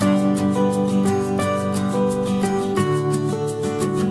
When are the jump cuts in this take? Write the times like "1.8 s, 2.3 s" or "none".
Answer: none